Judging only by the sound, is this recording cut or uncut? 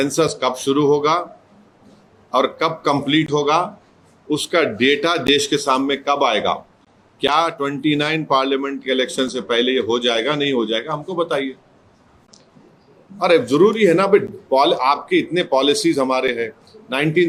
uncut